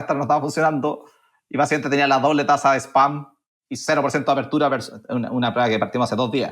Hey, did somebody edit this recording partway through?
no; 0 cuts

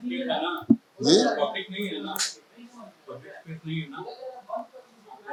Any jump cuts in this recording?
no; 0 cuts

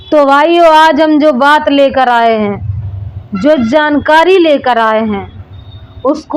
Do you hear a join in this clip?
no; 0 cuts

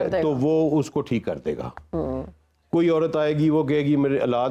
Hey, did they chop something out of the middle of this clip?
no; 0 cuts

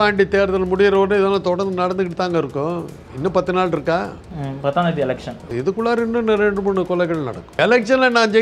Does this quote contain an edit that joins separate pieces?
yes; 2 cuts; at 5.5 s, 7.5 s

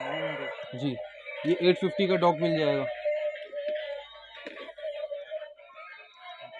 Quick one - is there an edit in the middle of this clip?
no; 0 cuts

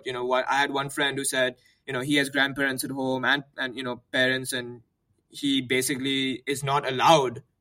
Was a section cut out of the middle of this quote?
no; 0 cuts

